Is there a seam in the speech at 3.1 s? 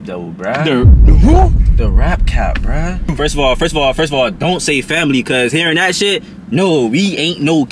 yes; 1 cut; at 3.1 s

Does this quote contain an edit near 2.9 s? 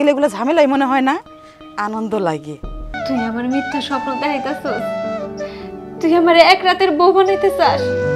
yes; 1 cut; at 2.9 s

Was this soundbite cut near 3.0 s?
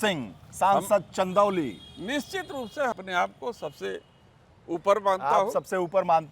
yes; 1 cut; at 3.0 s

